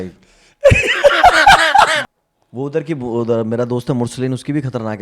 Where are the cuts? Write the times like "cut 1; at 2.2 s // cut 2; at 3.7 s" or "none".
cut 1; at 2.0 s